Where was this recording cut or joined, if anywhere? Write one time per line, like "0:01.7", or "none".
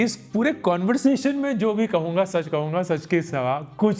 none